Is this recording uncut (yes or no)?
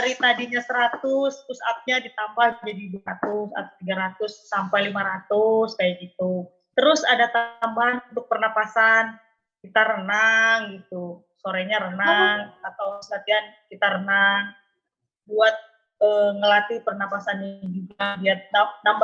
yes